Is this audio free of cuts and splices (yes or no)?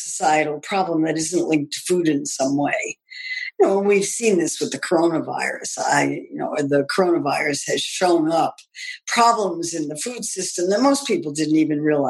yes